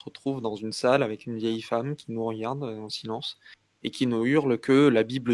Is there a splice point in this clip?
no; 0 cuts

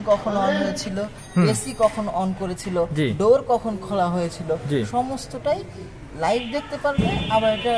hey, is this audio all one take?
yes; 0 cuts

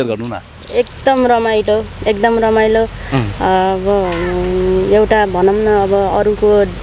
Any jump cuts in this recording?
no; 0 cuts

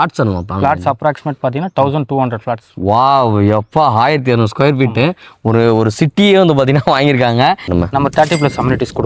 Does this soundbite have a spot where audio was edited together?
yes; 1 cut; at 7.7 s

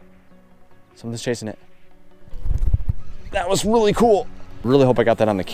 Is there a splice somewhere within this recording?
yes; 1 cut; at 4.6 s

